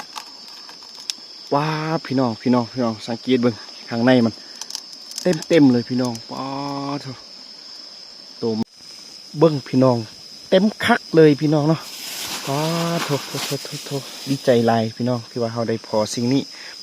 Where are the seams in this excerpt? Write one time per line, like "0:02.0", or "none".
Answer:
0:08.6